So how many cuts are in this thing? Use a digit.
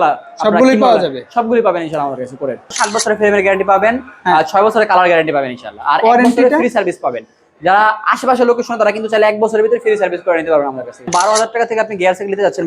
2